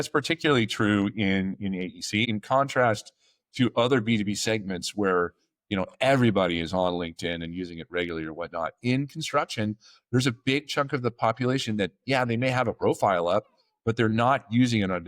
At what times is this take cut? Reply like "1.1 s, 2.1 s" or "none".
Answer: 2.3 s